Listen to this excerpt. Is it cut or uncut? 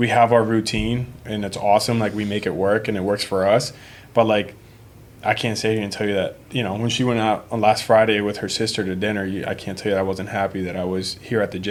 uncut